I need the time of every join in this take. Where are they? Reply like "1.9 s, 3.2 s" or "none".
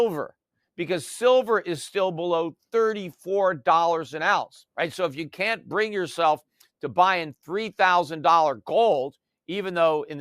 4.6 s

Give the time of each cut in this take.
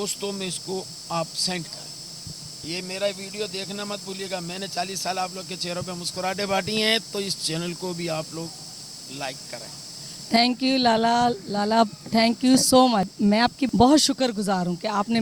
13.2 s

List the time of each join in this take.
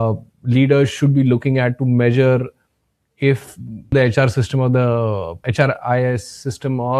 3.9 s, 5.4 s

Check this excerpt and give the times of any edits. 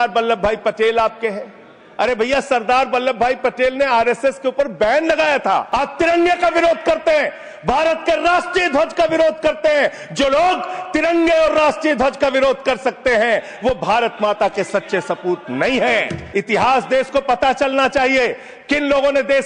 5.7 s, 16.2 s

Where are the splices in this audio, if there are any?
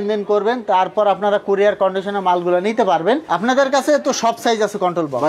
none

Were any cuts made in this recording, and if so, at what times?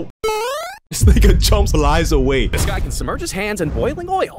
2.6 s

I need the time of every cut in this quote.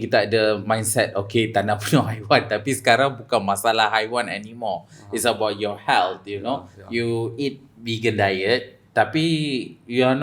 none

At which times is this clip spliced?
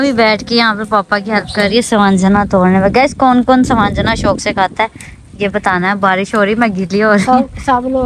none

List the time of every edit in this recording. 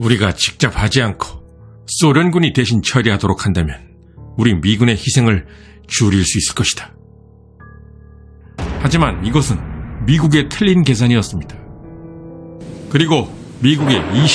12.7 s

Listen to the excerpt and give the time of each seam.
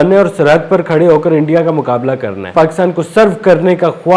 2.5 s

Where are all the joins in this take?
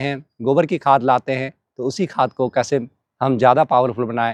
none

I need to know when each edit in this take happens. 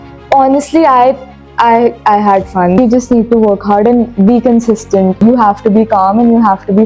2.8 s, 5.2 s

